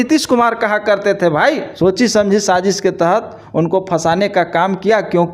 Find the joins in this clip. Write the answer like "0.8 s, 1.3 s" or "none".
1.8 s